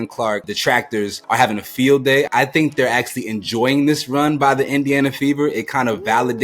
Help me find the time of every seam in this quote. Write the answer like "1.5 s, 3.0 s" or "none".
1.2 s, 2.3 s